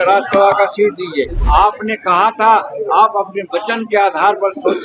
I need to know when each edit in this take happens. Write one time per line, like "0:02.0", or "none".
0:01.4